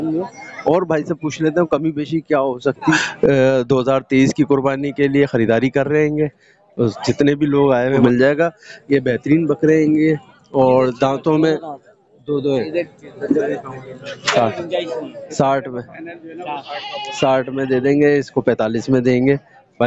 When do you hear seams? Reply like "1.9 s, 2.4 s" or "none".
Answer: 2.9 s, 8.0 s, 14.3 s